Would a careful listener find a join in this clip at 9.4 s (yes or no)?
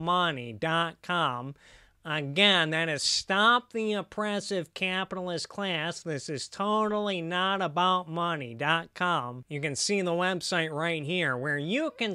yes